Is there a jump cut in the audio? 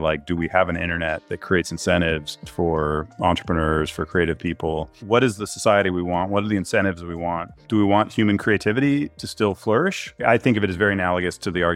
yes; 4 cuts; at 2.4 s, 5.0 s, 7.6 s, 10.2 s

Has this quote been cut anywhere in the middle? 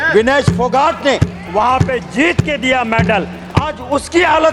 no; 0 cuts

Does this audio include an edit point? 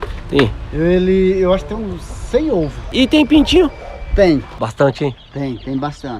yes; 2 cuts; at 2.9 s, 4.6 s

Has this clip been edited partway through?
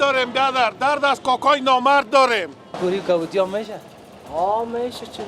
yes; 1 cut; at 2.8 s

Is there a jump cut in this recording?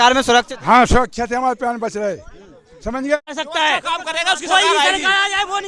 yes; 1 cut; at 3.3 s

